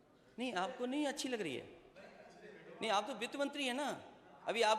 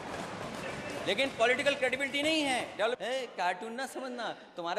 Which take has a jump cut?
second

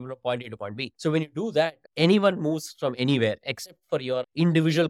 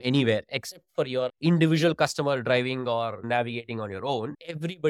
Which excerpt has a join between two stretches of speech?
second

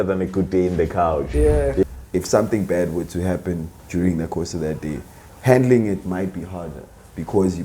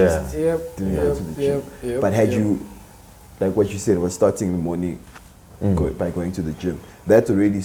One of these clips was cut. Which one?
first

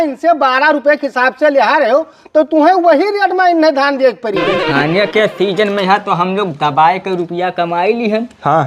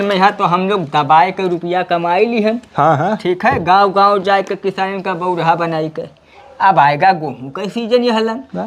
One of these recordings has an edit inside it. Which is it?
first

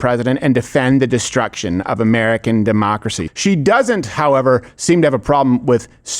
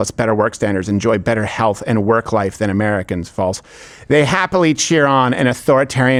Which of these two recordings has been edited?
first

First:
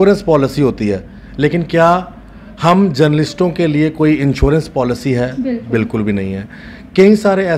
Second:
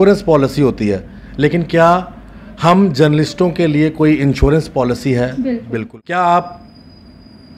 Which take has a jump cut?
second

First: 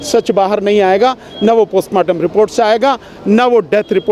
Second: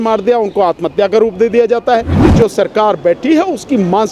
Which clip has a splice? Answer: second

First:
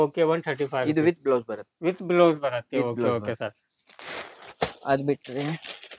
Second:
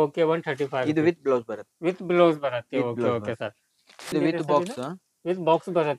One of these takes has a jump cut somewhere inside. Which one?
second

